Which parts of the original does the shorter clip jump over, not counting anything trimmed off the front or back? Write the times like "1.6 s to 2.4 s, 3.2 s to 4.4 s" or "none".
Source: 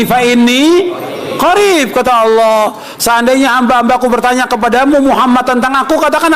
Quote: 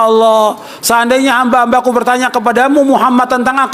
none

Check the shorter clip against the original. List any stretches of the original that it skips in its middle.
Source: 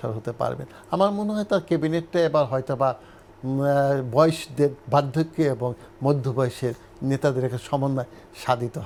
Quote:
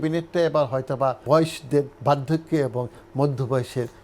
3.0 s to 4.1 s

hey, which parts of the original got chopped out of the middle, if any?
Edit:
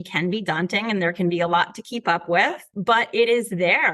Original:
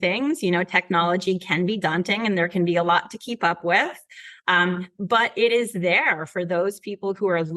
4.1 s to 4.9 s

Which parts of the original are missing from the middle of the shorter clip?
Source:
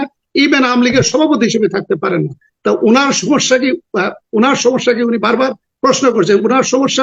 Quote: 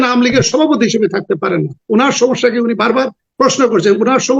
2.4 s to 4.2 s

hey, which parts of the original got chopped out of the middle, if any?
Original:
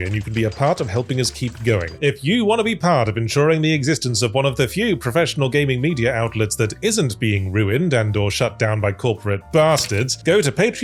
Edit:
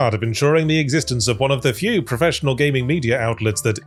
none

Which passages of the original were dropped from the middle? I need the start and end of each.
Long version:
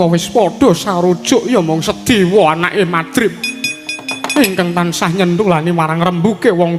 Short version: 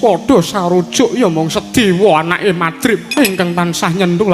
3.4 s to 4.3 s

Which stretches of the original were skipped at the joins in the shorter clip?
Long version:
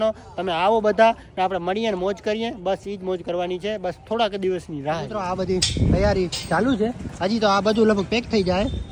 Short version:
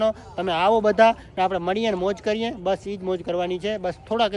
none

